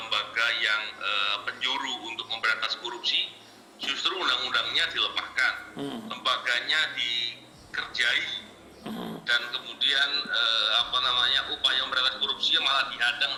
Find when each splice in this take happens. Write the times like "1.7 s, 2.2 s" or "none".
none